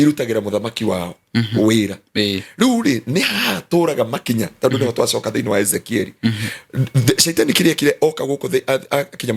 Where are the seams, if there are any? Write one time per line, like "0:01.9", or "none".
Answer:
none

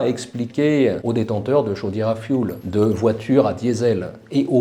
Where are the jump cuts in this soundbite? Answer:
0:01.0

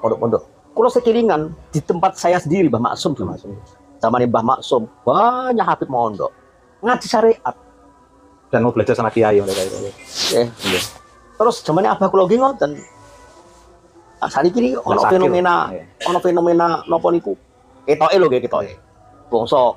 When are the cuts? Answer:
none

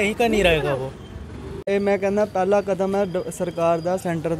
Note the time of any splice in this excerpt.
0:01.6

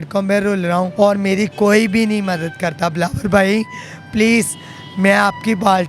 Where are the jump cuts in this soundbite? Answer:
0:00.9

